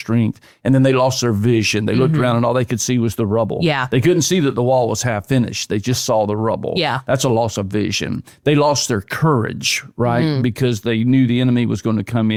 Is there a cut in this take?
no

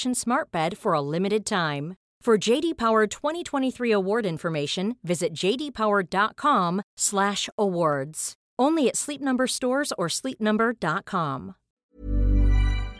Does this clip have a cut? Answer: yes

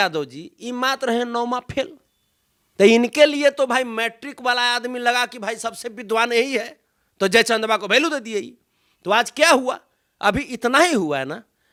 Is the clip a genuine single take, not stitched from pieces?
yes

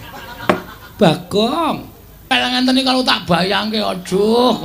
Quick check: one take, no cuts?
no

